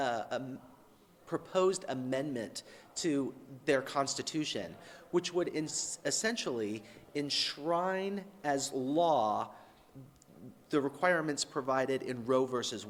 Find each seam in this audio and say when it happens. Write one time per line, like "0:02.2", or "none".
none